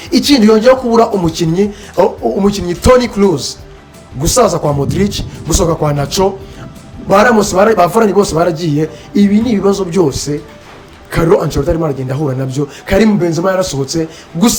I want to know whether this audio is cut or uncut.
uncut